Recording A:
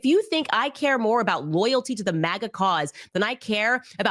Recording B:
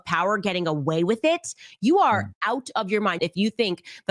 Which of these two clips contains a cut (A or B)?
B